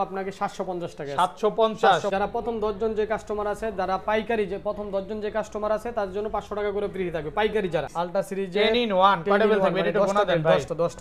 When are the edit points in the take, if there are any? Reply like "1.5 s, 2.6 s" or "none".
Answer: 2.1 s, 7.9 s